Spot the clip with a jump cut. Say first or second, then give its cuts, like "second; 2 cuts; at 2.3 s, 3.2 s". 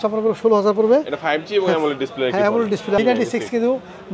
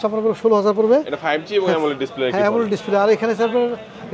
first; 1 cut; at 3.0 s